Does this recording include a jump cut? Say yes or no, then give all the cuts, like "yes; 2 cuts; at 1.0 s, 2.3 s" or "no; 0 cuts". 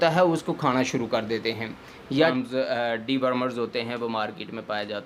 yes; 1 cut; at 2.3 s